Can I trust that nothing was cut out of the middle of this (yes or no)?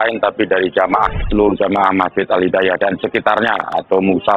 no